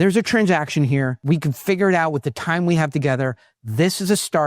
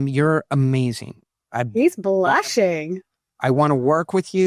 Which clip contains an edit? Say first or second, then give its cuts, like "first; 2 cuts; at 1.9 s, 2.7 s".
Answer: first; 1 cut; at 1.2 s